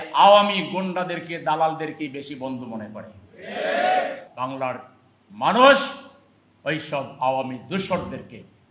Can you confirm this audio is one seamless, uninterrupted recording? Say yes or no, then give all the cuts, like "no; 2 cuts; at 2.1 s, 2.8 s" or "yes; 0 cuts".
no; 1 cut; at 4.2 s